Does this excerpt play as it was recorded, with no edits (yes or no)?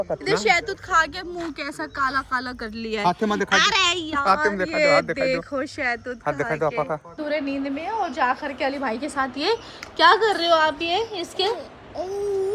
no